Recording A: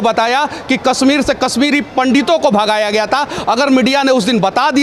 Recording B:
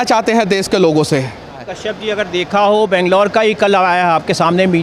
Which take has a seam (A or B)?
B